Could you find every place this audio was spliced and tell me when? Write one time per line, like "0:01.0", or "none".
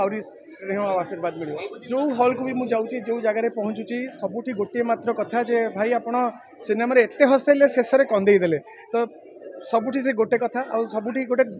0:01.8